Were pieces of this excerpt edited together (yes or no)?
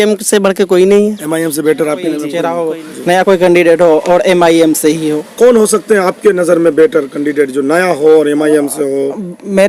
yes